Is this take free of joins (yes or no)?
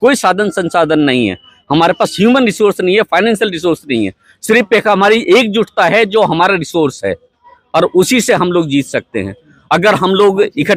yes